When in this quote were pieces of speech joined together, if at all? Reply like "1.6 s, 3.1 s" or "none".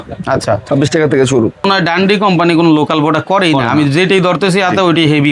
1.7 s